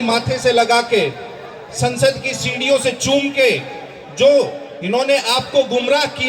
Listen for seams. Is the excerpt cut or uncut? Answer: uncut